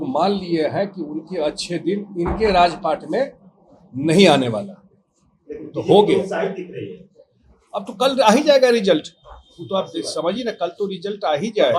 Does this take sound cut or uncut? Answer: uncut